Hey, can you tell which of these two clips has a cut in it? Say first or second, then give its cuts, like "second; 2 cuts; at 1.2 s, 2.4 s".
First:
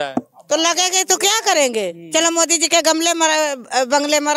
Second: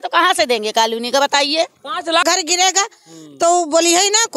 second; 1 cut; at 2.2 s